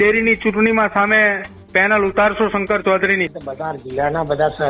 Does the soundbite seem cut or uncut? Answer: cut